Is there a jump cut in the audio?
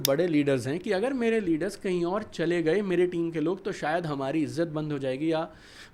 no; 0 cuts

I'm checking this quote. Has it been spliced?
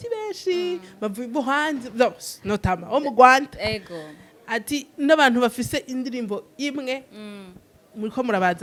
no; 0 cuts

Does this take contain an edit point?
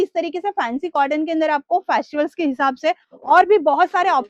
no; 0 cuts

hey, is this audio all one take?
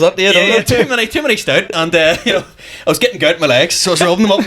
yes; 0 cuts

